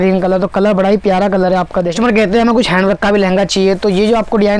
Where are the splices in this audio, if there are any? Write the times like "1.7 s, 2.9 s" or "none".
1.9 s